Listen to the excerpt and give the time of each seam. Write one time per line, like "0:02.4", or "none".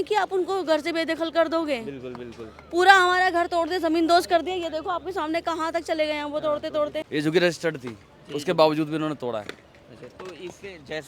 0:07.0